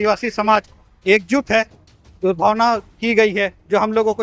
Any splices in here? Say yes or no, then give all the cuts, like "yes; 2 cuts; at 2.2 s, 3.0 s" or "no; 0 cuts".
yes; 1 cut; at 1.8 s